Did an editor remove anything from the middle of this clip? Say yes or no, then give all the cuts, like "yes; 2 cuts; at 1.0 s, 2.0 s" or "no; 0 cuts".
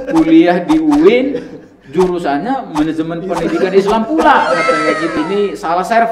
yes; 1 cut; at 5.1 s